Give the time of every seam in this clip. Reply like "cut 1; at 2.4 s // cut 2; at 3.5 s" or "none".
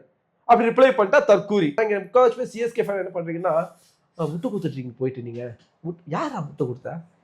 cut 1; at 1.8 s

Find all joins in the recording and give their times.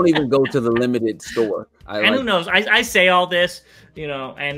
cut 1; at 1.8 s

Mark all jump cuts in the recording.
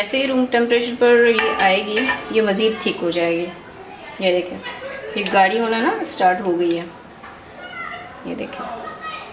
none

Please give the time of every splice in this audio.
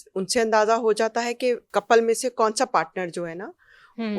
cut 1; at 1.6 s

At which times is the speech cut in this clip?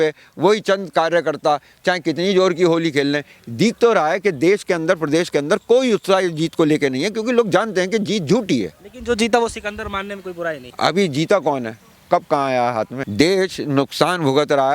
cut 1; at 8.9 s // cut 2; at 10.7 s // cut 3; at 13.0 s

